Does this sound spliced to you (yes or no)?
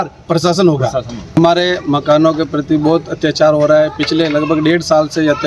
yes